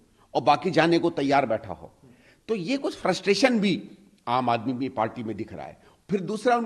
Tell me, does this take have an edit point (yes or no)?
no